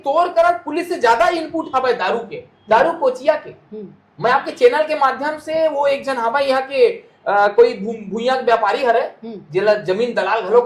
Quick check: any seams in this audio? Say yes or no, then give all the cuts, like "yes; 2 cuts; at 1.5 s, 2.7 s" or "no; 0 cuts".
no; 0 cuts